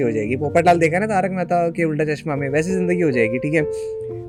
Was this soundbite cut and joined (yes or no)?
no